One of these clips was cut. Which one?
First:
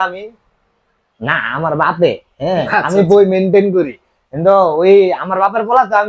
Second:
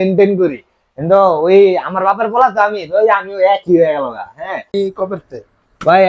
second; 1 cut; at 4.7 s

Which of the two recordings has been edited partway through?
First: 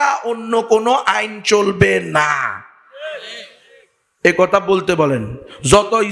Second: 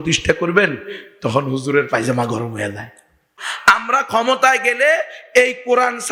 second; 1 cut; at 3.4 s

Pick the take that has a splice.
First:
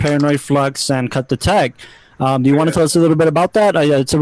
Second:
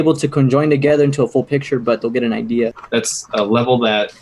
second; 1 cut; at 2.8 s

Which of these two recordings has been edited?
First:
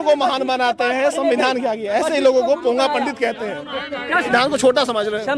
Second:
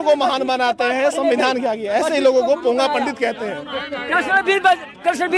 first; 1 cut; at 4.3 s

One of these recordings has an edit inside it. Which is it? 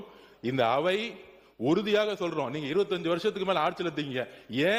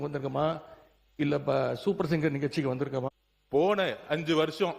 second; 1 cut; at 3.1 s

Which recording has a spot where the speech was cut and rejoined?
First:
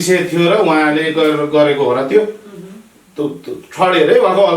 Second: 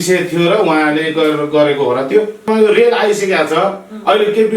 second; 1 cut; at 2.5 s

